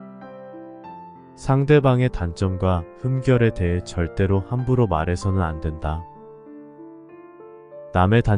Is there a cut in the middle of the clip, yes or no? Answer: yes